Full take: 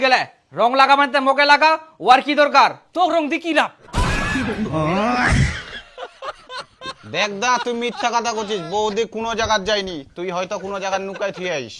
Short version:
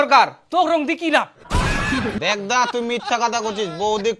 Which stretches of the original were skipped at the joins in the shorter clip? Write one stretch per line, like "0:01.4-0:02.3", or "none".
0:04.6-0:07.1